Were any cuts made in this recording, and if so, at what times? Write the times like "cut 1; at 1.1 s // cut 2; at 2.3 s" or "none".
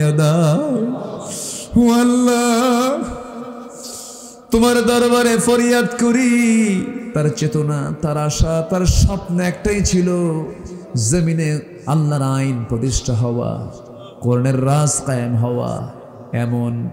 cut 1; at 7.0 s